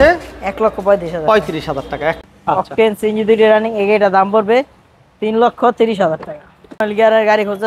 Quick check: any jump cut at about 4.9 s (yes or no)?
no